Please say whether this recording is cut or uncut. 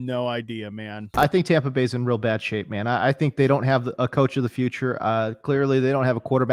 cut